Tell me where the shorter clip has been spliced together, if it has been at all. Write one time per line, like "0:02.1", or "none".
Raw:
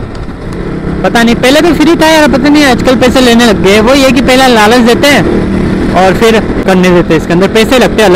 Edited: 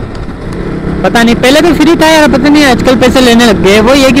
none